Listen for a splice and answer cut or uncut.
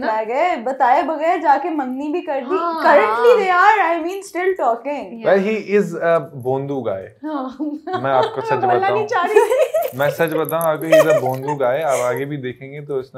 uncut